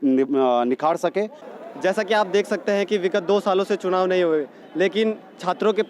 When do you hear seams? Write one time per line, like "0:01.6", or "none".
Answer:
0:01.4